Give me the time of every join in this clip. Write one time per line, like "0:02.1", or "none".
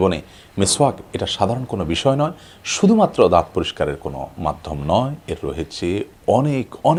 none